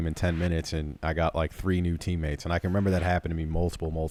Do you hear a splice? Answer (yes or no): no